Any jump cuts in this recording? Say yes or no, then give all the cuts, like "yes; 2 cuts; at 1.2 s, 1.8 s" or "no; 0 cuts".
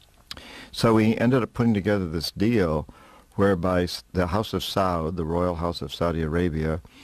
yes; 1 cut; at 4.2 s